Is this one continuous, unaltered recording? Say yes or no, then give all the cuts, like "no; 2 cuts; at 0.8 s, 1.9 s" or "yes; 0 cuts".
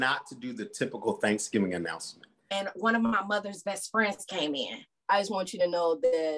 no; 2 cuts; at 2.4 s, 4.9 s